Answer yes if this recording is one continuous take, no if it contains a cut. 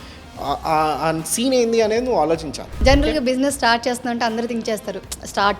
no